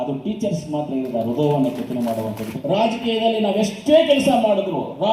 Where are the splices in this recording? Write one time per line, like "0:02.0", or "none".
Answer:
0:02.5